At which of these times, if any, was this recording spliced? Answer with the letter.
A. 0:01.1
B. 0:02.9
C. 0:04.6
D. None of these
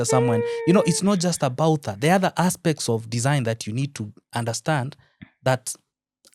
D